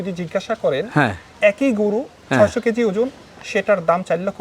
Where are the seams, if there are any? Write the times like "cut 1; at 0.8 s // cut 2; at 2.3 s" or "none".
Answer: cut 1; at 1.3 s